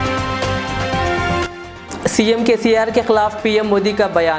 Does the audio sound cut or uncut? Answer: cut